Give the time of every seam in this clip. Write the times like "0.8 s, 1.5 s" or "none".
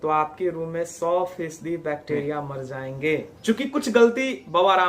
3.3 s